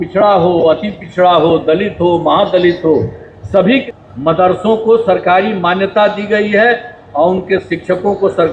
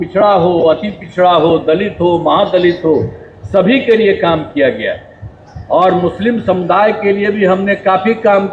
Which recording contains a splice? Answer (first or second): first